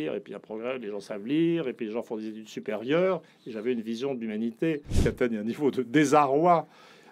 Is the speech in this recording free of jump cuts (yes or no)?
no